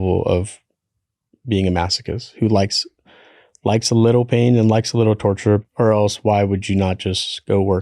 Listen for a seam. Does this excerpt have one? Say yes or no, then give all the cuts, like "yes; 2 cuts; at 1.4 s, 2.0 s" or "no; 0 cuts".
yes; 1 cut; at 5.6 s